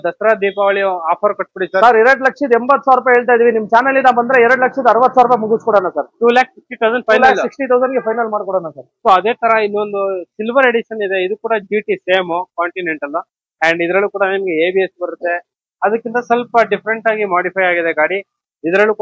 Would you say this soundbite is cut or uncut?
uncut